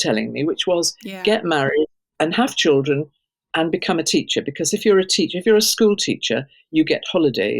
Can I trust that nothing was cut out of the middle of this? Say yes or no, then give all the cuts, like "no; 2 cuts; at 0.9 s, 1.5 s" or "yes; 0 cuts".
no; 1 cut; at 2.0 s